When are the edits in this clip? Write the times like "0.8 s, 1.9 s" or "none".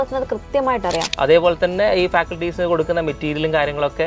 1.1 s